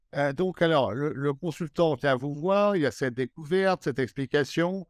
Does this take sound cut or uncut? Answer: uncut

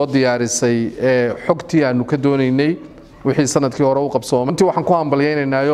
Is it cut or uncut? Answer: cut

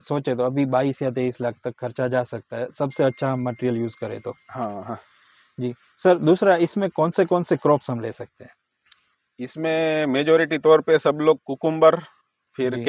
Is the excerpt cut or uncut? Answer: uncut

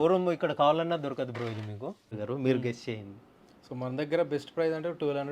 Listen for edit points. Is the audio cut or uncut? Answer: cut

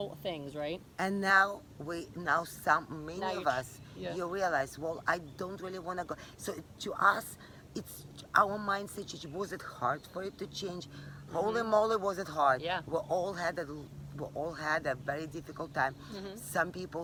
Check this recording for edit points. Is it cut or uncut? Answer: uncut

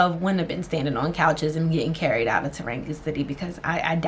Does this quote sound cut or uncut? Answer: uncut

